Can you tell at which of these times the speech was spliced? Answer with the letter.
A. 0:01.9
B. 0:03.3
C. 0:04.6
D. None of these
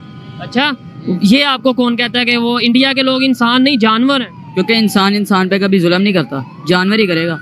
C